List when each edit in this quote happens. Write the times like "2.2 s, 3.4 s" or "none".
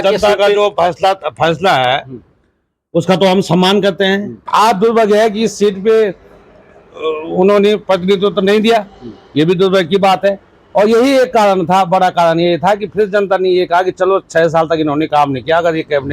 4.4 s